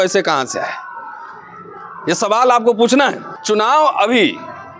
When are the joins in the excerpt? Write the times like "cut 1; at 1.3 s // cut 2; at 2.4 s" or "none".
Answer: cut 1; at 3.3 s